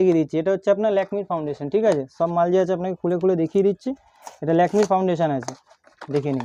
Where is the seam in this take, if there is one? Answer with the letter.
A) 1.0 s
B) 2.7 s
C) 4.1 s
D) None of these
D